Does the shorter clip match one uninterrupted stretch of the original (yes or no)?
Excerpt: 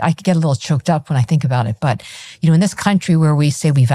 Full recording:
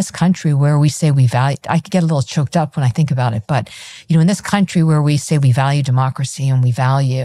yes